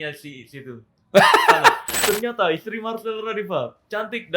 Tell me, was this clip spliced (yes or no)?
yes